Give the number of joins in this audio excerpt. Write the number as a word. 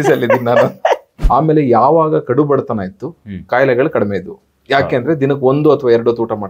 one